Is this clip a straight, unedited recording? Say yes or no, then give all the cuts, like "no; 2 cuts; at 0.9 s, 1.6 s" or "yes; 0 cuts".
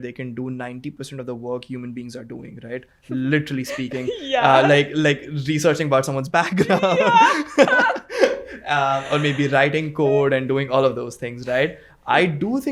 yes; 0 cuts